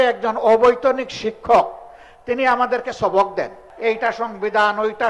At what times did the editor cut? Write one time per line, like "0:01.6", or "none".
0:03.6